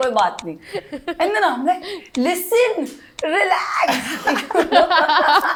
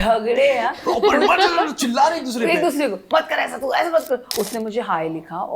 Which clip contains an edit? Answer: second; 1 cut; at 4.3 s

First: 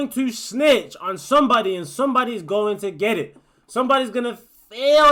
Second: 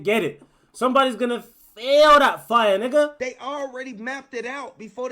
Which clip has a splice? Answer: second; 1 cut; at 3.1 s

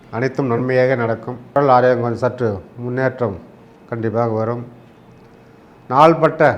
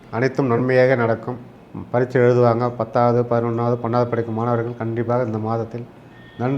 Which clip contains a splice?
second; 1 cut; at 1.3 s

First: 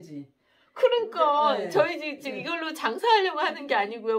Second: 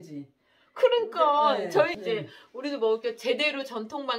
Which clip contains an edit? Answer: second; 1 cut; at 2.0 s

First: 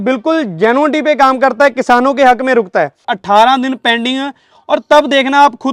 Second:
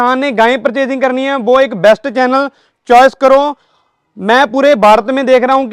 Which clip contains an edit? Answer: first; 1 cut; at 3.1 s

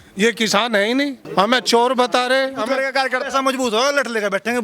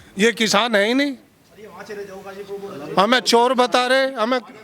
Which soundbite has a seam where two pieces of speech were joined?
first; 2 cuts; at 1.2 s, 2.8 s

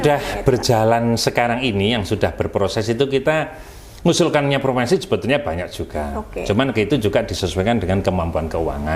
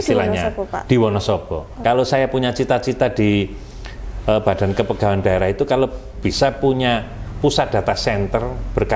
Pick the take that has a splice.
second; 1 cut; at 1.7 s

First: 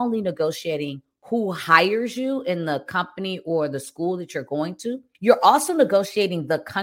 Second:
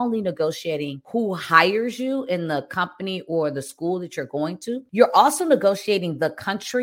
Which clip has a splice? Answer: second; 2 cuts; at 1.0 s, 4.9 s

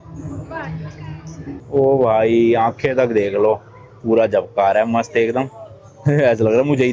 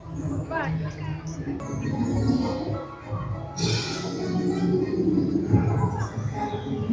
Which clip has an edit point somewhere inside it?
first; 1 cut; at 1.6 s

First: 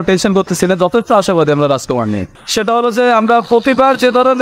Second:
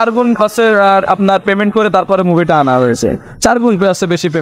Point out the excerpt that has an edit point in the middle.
first; 1 cut; at 2.4 s

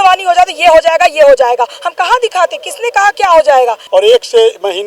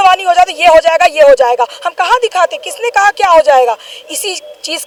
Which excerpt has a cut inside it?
first; 1 cut; at 3.8 s

